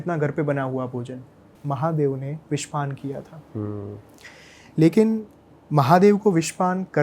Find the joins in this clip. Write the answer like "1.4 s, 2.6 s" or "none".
1.4 s